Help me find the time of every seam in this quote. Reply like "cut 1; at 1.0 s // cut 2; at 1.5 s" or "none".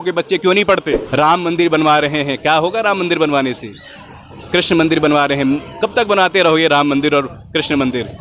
cut 1; at 1.0 s